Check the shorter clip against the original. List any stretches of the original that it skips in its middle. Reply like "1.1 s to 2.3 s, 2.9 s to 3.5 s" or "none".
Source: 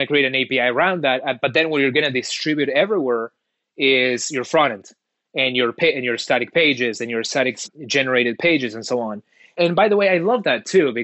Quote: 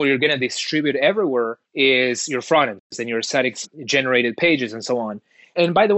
3.4 s to 3.6 s, 5.0 s to 7.0 s